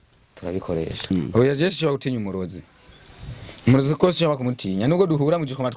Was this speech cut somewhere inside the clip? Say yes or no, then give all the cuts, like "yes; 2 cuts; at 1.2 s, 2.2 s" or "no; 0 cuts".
yes; 1 cut; at 1.1 s